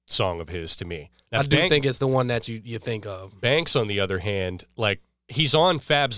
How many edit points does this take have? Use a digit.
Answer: 2